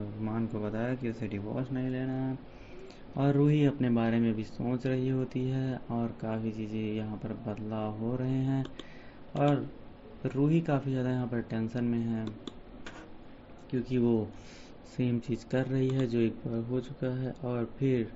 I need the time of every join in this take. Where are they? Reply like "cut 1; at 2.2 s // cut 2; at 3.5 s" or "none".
none